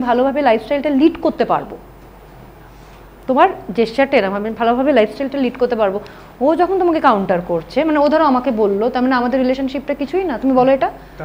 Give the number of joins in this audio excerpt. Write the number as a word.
zero